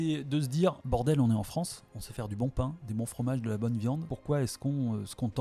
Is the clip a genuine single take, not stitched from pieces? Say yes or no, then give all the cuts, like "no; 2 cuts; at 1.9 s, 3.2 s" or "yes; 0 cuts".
no; 2 cuts; at 0.8 s, 4.1 s